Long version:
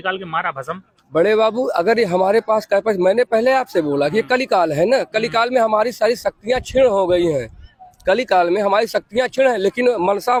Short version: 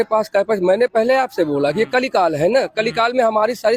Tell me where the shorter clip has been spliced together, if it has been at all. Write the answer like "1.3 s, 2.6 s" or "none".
none